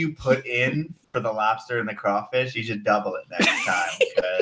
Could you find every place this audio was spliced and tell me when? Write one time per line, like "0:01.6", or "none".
0:01.0